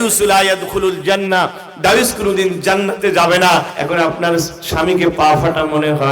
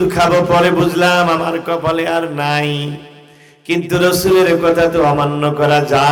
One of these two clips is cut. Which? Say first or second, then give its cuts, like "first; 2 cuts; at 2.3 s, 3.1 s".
first; 1 cut; at 3.7 s